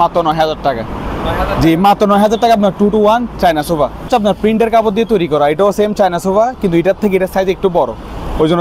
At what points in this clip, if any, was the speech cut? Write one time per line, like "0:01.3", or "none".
0:04.1